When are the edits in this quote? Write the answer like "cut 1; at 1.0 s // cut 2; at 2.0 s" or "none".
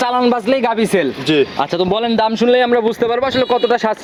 none

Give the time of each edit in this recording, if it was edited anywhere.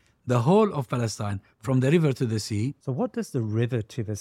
cut 1; at 2.8 s

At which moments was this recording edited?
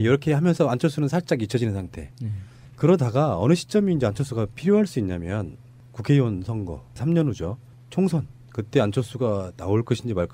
cut 1; at 4.9 s

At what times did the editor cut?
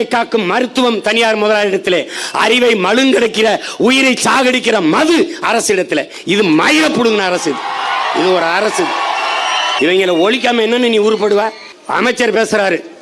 cut 1; at 9.7 s // cut 2; at 11.7 s

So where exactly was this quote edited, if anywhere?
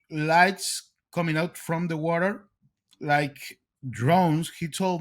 none

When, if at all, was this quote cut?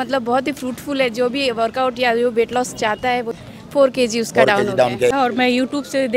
cut 1; at 3.4 s // cut 2; at 5.1 s

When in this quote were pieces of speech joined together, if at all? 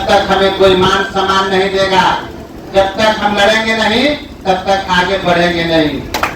none

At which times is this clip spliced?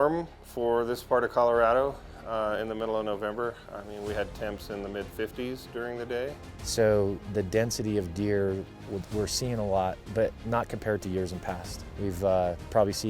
cut 1; at 6.5 s

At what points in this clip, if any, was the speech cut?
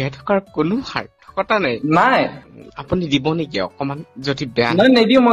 cut 1; at 2.5 s

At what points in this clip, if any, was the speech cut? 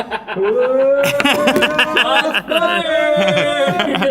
none

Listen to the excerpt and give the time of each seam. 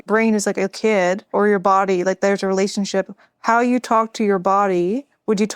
cut 1; at 1.3 s

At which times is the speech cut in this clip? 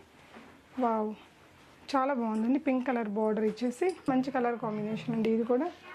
cut 1; at 4.1 s

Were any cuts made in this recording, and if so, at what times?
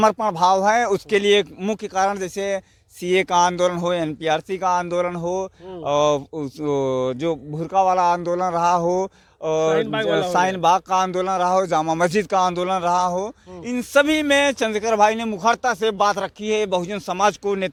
none

